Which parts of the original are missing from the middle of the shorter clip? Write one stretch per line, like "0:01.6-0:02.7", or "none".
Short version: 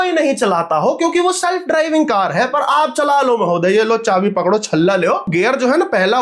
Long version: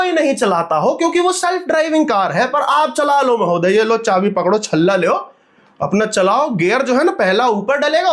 0:05.3-0:06.5